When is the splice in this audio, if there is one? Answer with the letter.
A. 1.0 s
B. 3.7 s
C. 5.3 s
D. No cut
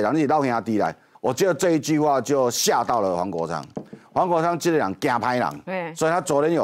A